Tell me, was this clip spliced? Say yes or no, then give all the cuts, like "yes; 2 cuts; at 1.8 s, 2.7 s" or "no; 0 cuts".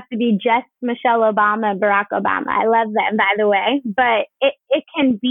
no; 0 cuts